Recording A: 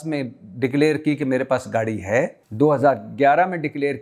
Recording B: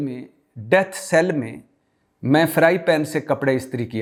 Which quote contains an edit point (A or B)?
A